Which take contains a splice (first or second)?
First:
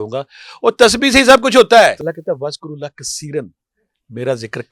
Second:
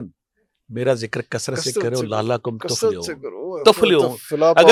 first